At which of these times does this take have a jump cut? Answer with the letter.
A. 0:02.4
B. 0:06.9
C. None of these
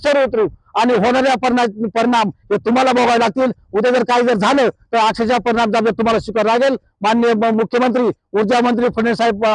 C